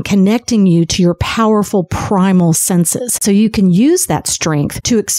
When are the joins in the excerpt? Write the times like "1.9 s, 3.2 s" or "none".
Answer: 3.2 s